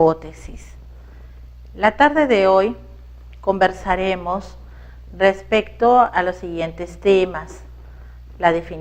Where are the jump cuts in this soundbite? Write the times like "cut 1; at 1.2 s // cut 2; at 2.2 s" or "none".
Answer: cut 1; at 6.8 s